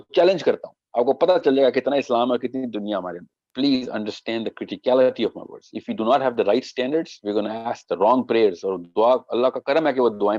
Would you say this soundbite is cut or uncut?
cut